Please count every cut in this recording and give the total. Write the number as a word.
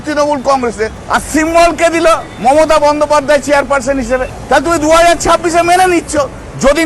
three